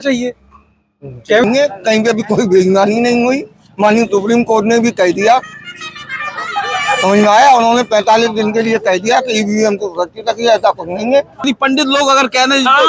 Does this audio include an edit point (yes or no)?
yes